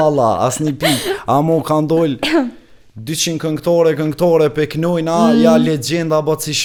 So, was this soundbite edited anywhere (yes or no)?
no